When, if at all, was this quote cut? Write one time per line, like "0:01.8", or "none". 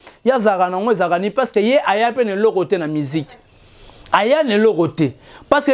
none